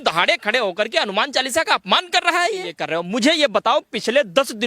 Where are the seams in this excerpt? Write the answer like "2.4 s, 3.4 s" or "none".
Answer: 2.8 s